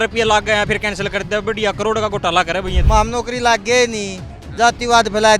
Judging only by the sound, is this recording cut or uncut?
cut